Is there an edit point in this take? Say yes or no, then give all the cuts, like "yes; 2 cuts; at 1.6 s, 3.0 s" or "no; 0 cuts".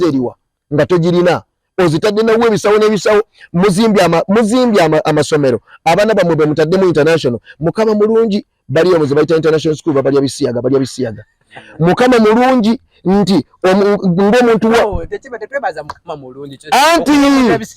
no; 0 cuts